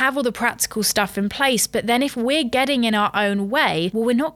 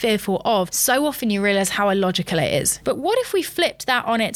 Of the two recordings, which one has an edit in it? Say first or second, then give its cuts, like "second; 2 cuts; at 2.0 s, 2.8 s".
second; 1 cut; at 2.8 s